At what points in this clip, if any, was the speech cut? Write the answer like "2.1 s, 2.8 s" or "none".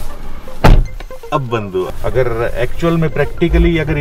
1.9 s